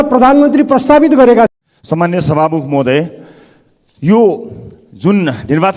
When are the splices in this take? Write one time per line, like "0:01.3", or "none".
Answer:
0:01.5

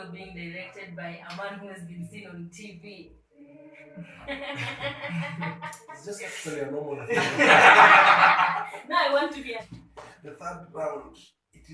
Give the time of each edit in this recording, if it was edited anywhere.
0:09.6

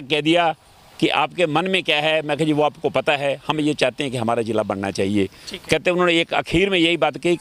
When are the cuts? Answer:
none

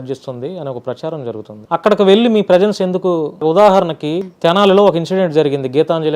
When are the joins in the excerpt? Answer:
0:01.5
0:03.4
0:04.3

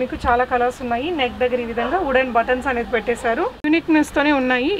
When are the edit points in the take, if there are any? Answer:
0:03.6

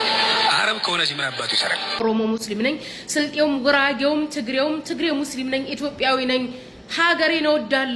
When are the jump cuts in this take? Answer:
0:02.0

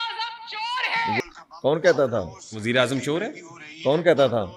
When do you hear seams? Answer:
0:01.2

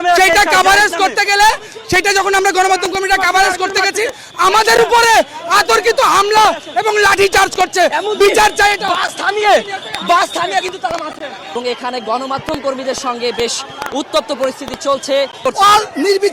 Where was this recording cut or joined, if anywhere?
0:11.5
0:15.4

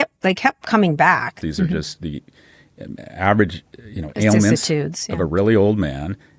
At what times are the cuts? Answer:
0:01.4

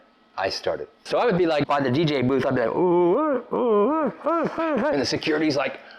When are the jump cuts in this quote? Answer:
0:00.9
0:01.7
0:04.9

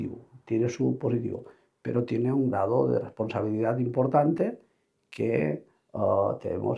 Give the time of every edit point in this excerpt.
none

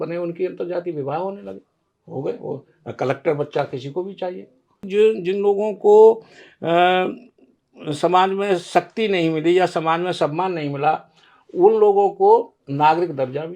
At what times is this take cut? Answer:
0:04.8

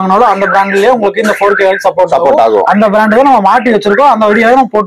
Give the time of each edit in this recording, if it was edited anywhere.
none

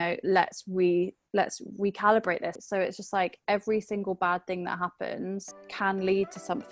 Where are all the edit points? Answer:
0:02.6
0:05.6

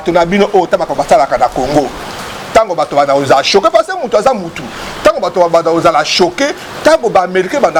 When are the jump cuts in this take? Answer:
none

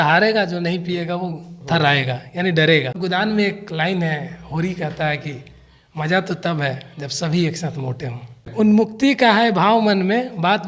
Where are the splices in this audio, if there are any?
0:03.0
0:08.4

